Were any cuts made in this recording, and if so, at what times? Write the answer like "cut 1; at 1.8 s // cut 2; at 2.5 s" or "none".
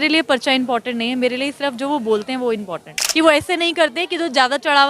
cut 1; at 3.0 s